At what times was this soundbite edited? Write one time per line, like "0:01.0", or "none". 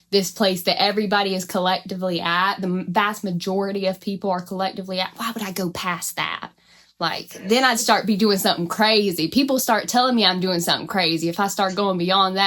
none